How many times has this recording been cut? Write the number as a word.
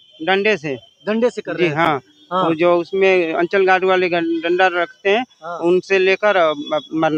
zero